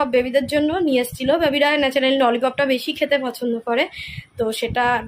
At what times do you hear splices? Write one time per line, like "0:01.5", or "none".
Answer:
none